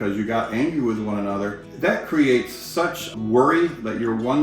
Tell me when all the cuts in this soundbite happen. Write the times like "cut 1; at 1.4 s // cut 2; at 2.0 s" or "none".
cut 1; at 1.6 s // cut 2; at 3.1 s